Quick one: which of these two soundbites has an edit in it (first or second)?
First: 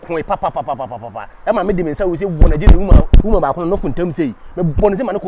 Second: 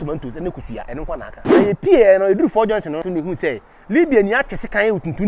second